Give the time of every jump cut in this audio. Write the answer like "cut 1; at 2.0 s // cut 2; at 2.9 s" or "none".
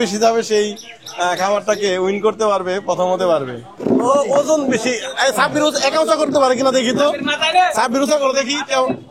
cut 1; at 3.7 s